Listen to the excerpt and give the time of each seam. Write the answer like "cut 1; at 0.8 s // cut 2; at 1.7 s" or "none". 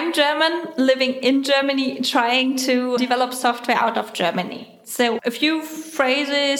cut 1; at 3.0 s // cut 2; at 5.1 s